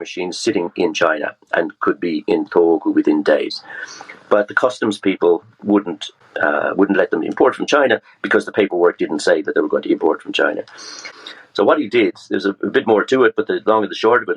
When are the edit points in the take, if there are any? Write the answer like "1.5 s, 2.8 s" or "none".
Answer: 6.1 s, 11.2 s